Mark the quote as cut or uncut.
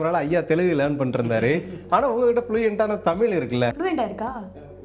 cut